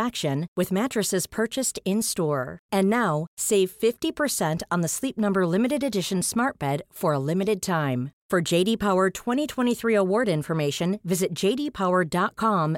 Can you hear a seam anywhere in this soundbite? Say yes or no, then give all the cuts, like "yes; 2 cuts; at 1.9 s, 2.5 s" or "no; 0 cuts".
no; 0 cuts